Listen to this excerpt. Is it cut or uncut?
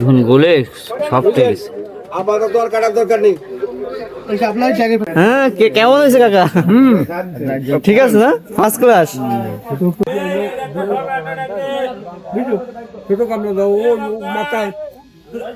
cut